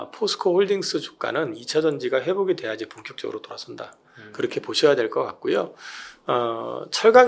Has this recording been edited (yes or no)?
no